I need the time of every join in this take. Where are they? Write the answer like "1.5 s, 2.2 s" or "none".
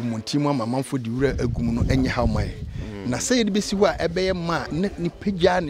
4.7 s